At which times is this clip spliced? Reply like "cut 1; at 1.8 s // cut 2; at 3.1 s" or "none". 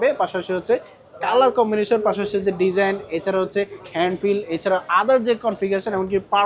none